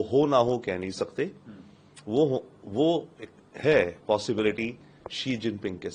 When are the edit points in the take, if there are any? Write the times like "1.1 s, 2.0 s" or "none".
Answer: none

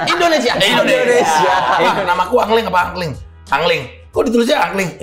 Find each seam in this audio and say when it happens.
2.0 s

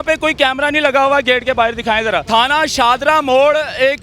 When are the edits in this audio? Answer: 2.2 s

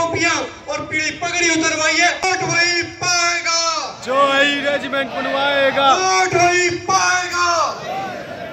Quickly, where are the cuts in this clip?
2.2 s

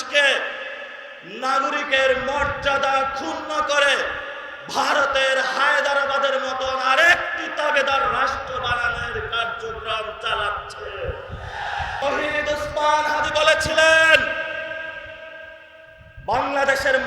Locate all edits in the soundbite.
12.0 s

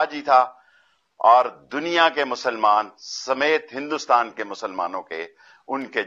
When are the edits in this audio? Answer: none

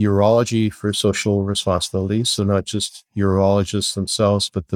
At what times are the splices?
none

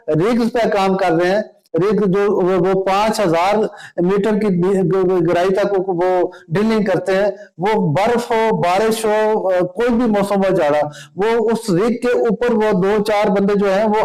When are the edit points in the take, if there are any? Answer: none

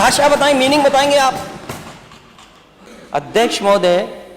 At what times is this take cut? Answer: 2.9 s

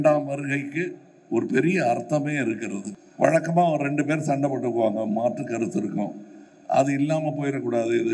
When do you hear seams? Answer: 2.9 s

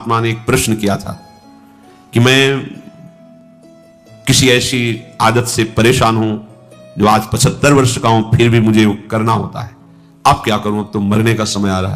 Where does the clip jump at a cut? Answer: none

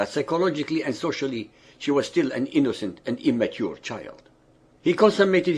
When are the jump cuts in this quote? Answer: 1.0 s

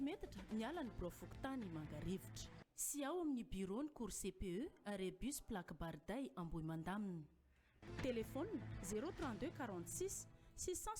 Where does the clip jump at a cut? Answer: none

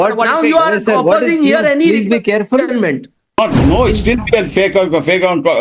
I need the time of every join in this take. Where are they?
3.4 s

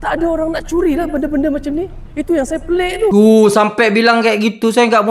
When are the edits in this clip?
3.1 s

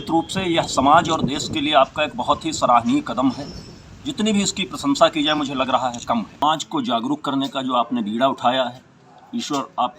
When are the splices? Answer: 5.4 s, 6.4 s

